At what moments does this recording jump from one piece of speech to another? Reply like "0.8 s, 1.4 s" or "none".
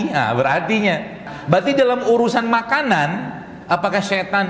1.3 s